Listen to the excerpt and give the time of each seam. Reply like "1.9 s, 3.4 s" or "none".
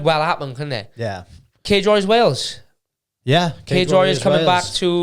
1.3 s